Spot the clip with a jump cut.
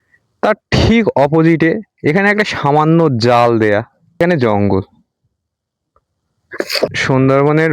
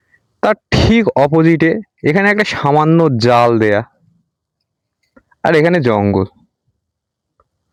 first; 2 cuts; at 4.2 s, 6.9 s

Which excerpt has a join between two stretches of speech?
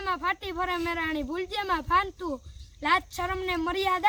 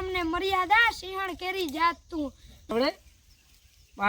second; 1 cut; at 2.7 s

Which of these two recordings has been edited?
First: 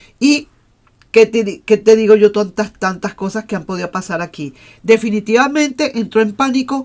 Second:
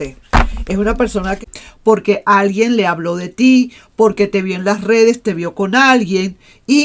second; 1 cut; at 1.3 s

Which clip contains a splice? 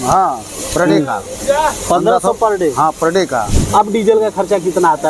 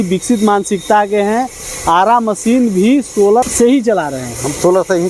first; 1 cut; at 3.6 s

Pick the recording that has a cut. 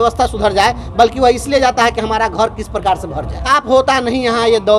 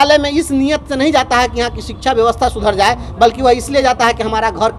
first; 1 cut; at 3.5 s

